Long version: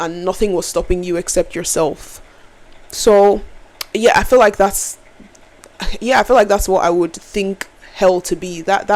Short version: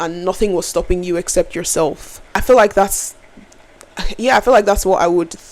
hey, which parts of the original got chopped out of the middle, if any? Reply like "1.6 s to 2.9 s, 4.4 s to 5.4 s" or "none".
2.4 s to 4.2 s